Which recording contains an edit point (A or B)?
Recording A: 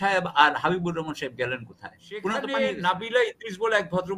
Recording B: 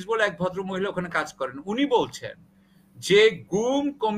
A